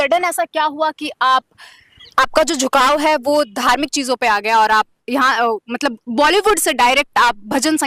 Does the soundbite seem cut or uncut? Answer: uncut